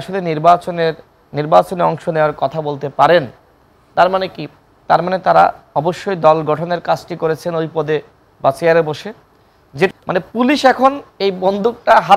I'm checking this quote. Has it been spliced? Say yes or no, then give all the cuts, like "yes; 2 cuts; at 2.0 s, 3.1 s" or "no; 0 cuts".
yes; 1 cut; at 9.9 s